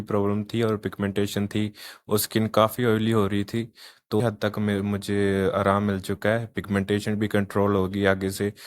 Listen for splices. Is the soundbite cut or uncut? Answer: cut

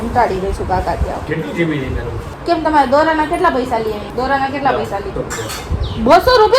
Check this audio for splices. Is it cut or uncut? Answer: uncut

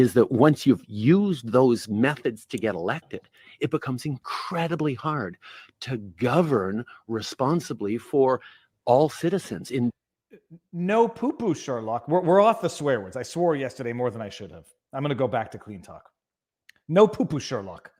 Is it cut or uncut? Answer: uncut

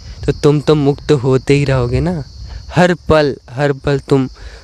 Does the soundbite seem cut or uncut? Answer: uncut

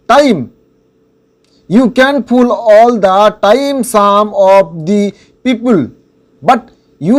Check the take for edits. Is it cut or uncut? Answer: uncut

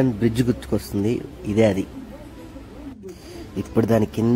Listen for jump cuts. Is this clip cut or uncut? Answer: uncut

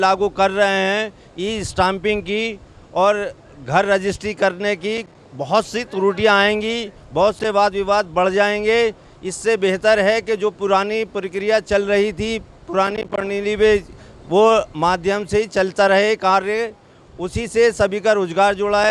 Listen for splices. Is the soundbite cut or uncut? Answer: uncut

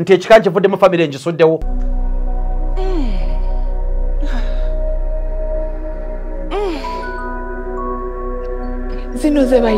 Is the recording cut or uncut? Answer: cut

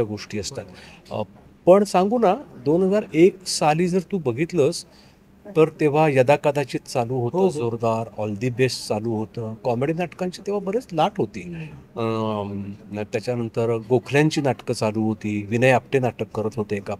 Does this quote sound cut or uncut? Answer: uncut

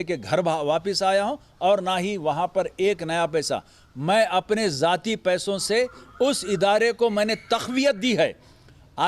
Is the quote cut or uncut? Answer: uncut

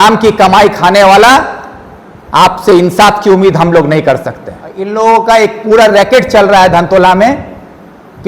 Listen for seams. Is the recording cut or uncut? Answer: cut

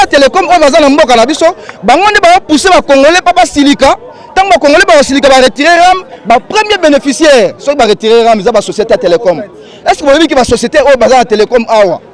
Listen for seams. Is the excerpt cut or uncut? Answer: uncut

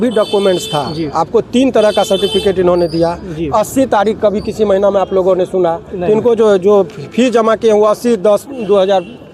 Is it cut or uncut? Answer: uncut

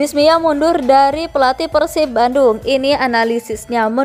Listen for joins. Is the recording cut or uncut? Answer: uncut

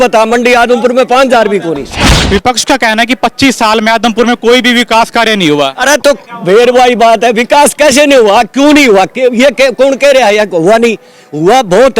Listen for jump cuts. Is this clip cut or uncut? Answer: cut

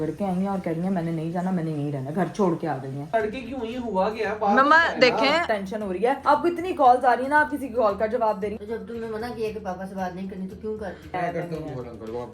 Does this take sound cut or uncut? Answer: cut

